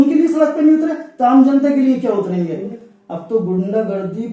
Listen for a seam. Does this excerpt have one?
yes; 1 cut; at 2.7 s

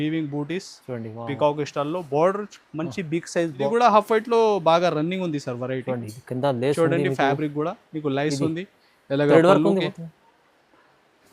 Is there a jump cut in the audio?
yes; 1 cut; at 3.7 s

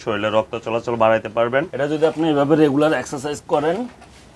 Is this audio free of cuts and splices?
no; 1 cut; at 1.7 s

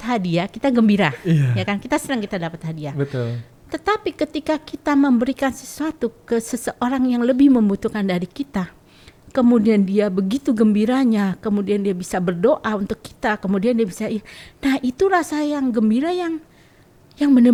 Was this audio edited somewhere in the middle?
no; 0 cuts

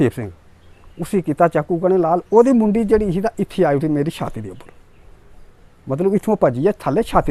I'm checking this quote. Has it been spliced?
no; 0 cuts

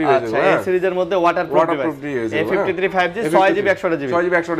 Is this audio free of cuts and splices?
yes; 0 cuts

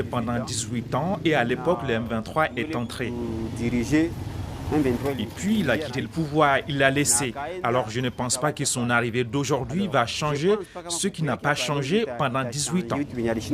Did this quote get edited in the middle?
no; 0 cuts

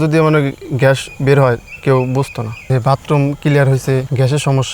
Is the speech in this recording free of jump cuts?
no; 1 cut; at 2.7 s

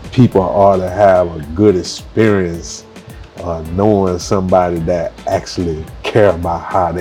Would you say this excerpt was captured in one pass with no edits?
yes; 0 cuts

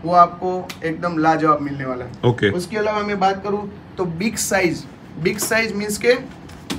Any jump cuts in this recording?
no; 0 cuts

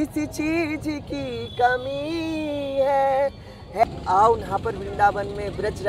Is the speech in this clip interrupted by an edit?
yes; 1 cut; at 3.8 s

